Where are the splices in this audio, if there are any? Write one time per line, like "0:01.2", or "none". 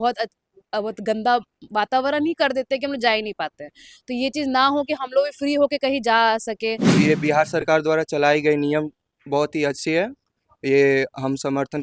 0:06.9